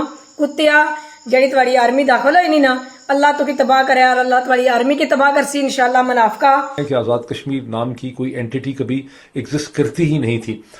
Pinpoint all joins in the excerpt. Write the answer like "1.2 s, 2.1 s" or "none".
6.8 s